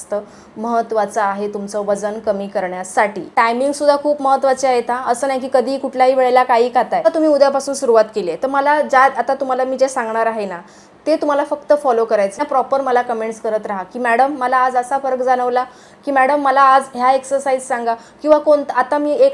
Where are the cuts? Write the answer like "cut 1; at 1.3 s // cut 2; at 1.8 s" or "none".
cut 1; at 3.3 s // cut 2; at 7.1 s // cut 3; at 12.4 s